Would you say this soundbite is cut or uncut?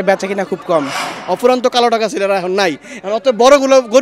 cut